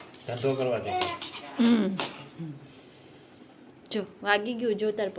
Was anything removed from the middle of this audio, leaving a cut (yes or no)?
no